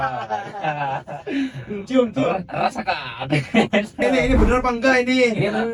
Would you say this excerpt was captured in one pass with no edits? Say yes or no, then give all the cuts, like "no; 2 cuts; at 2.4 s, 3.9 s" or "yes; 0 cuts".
no; 1 cut; at 4.1 s